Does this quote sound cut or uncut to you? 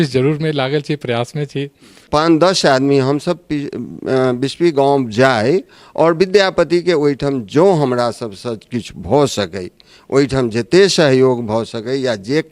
cut